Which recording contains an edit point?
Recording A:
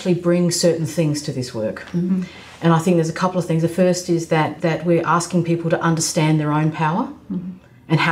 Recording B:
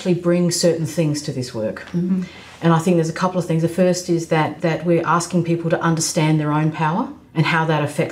B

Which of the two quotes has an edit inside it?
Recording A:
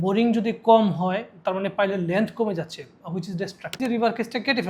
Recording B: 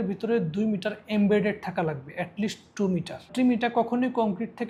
A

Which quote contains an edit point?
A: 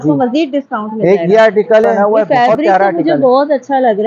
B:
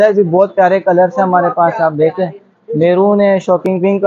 A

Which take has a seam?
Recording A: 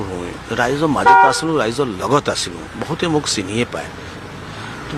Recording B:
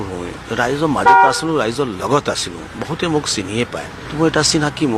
B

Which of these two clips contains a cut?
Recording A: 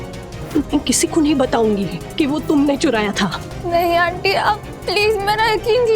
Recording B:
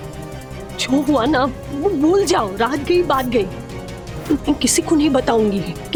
A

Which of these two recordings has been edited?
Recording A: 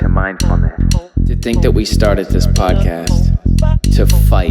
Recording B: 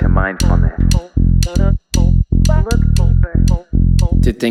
A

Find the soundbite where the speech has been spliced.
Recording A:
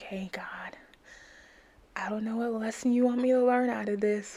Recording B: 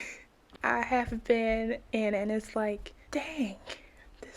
B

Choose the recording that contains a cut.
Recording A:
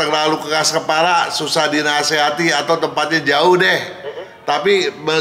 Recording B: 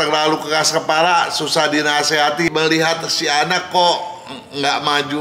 B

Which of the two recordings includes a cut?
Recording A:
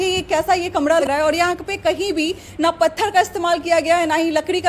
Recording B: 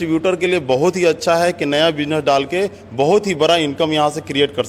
A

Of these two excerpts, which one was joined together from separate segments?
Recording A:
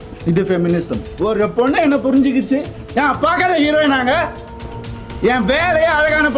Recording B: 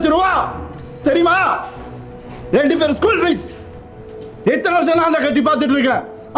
A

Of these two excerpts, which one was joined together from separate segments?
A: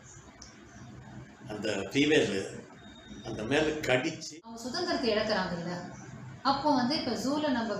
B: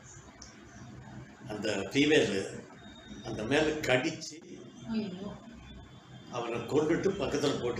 A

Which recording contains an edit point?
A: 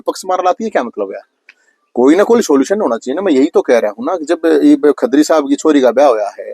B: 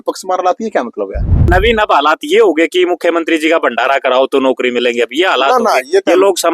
B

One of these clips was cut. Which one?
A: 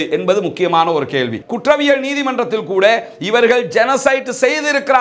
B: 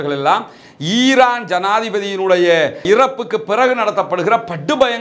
A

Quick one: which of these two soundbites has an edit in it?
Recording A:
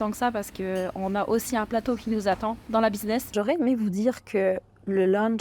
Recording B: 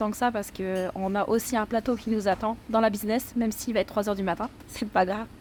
A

